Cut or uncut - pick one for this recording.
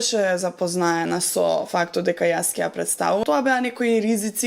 cut